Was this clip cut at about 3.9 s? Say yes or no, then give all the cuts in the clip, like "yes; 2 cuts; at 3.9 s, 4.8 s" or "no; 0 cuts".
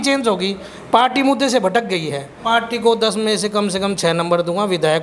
no; 1 cut; at 2.4 s